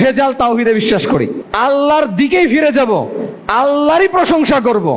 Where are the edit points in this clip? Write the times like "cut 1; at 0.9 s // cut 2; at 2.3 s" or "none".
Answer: cut 1; at 1.4 s

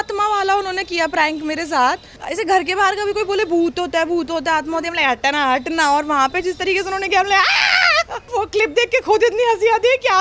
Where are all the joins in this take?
cut 1; at 2.1 s // cut 2; at 8.3 s

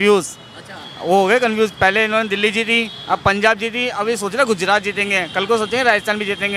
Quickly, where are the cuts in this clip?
none

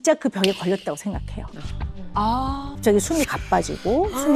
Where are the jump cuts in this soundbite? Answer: cut 1; at 2.7 s

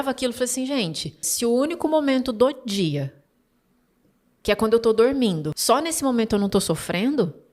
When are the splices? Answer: cut 1; at 1.3 s // cut 2; at 5.5 s

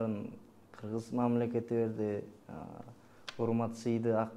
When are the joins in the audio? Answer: none

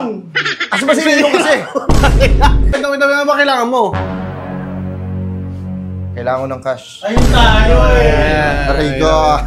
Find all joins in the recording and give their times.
cut 1; at 2.8 s

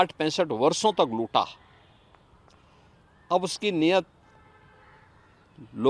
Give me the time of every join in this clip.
none

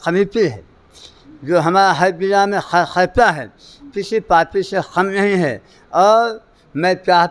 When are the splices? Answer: none

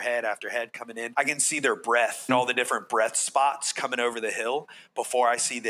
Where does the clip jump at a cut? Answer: cut 1; at 1.0 s // cut 2; at 2.3 s

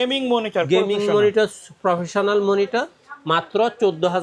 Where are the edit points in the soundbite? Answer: none

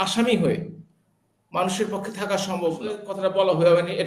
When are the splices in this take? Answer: cut 1; at 3.1 s

